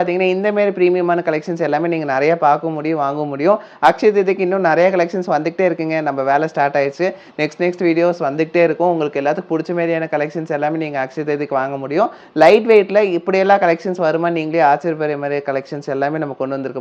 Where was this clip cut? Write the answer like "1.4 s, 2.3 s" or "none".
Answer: none